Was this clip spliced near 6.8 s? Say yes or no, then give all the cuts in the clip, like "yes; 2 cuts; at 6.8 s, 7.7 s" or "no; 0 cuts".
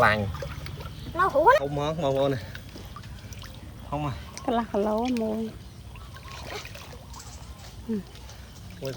no; 1 cut; at 1.6 s